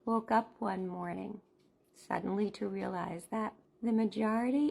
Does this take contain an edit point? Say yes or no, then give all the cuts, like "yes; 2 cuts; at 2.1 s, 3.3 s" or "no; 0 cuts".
yes; 1 cut; at 3.6 s